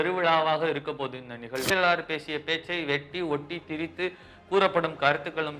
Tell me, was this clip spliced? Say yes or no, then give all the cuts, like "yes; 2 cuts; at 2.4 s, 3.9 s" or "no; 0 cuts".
yes; 1 cut; at 1.7 s